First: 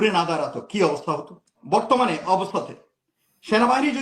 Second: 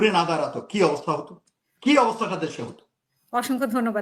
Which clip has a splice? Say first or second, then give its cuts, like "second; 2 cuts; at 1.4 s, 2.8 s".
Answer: first; 1 cut; at 1.6 s